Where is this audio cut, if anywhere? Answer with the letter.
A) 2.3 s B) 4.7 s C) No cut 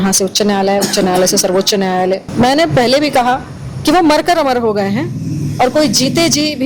A